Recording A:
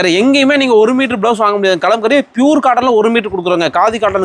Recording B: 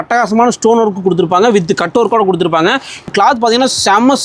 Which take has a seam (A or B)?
B